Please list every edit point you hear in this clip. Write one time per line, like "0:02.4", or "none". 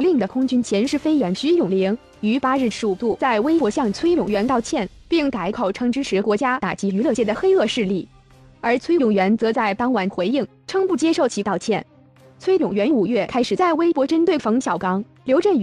0:01.5